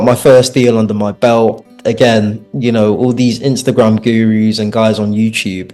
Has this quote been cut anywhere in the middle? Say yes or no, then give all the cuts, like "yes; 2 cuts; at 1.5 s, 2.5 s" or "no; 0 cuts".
no; 0 cuts